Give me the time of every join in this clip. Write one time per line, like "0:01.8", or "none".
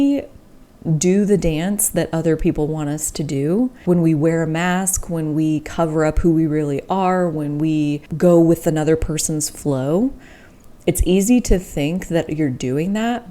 0:03.8
0:08.1